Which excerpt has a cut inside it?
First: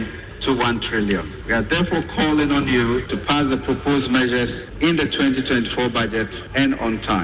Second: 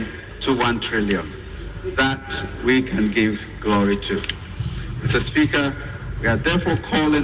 first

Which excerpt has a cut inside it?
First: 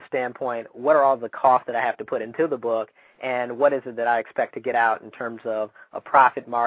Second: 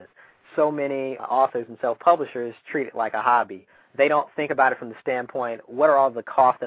second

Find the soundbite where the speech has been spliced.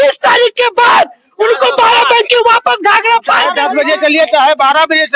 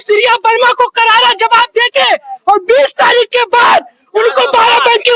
first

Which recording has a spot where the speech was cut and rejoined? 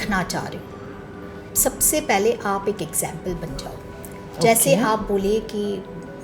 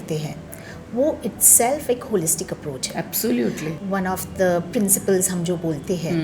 second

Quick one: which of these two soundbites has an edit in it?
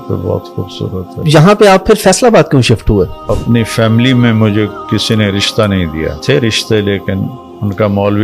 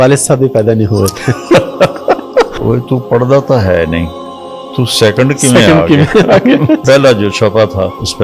first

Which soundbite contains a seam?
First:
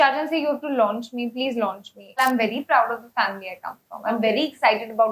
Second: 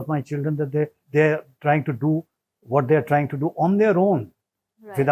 first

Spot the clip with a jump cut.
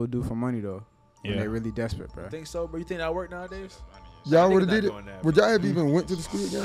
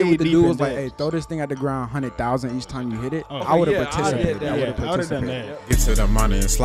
second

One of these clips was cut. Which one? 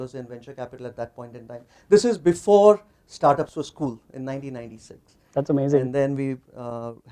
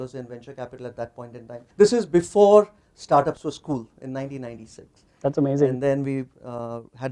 second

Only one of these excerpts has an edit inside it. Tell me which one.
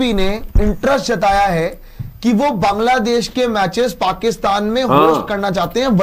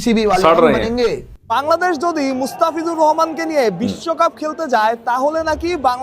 second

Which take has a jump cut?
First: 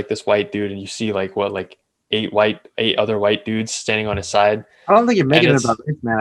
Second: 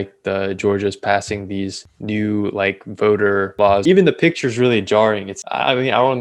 second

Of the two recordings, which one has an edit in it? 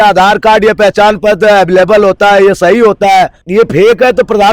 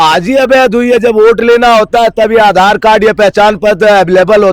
first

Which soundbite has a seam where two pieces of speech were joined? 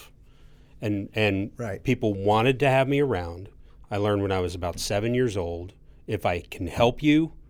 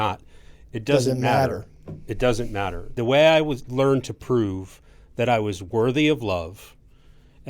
second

